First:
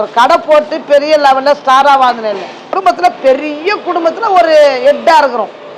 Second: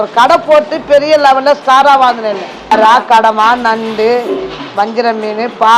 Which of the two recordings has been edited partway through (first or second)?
second